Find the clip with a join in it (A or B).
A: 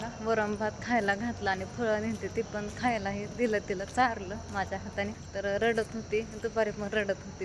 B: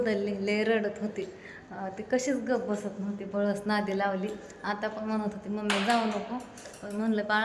A